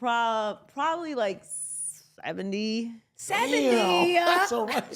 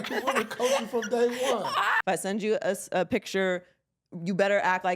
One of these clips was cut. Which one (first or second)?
second